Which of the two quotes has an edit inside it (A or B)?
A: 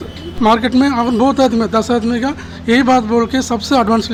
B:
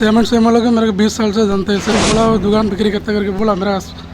B